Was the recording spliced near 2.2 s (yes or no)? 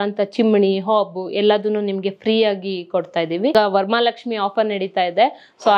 no